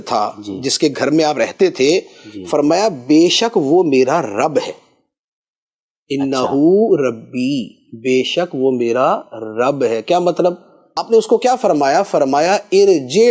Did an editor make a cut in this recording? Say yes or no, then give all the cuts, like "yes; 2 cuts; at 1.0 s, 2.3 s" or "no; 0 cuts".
yes; 1 cut; at 11.0 s